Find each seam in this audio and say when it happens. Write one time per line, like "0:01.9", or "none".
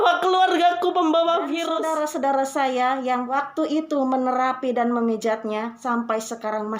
0:01.7
0:03.3
0:05.8